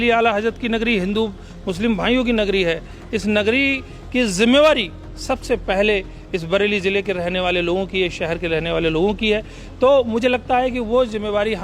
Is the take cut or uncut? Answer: uncut